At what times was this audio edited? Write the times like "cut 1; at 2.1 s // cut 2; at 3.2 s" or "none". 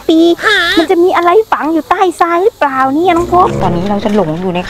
cut 1; at 3.6 s